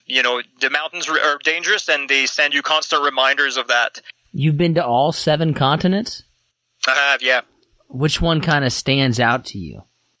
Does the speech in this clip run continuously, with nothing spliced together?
yes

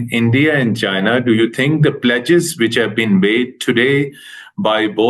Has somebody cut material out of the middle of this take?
no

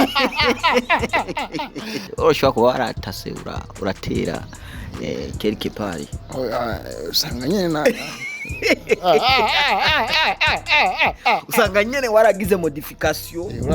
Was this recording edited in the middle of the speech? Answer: yes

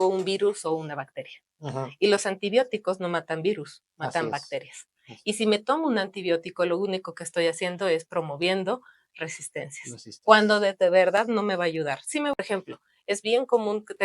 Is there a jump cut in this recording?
yes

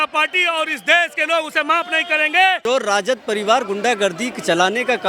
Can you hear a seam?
yes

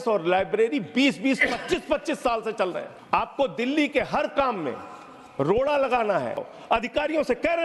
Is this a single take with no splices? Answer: no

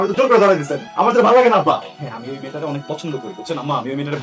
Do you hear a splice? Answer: yes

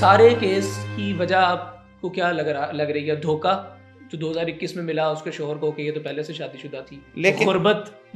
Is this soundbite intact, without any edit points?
yes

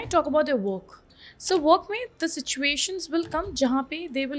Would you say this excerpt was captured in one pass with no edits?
yes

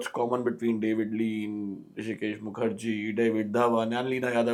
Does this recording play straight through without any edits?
yes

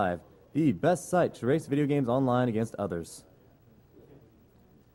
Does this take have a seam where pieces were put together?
no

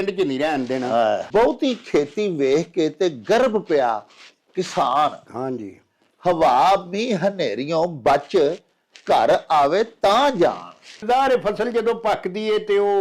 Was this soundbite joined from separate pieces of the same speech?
yes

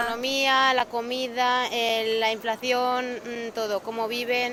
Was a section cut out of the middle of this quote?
no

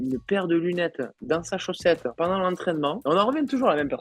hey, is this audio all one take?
yes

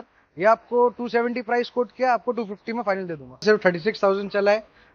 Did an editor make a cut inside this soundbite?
yes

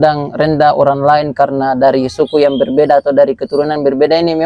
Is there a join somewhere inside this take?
no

